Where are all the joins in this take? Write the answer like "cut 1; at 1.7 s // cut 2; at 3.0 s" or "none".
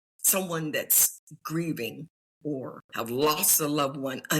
cut 1; at 2.8 s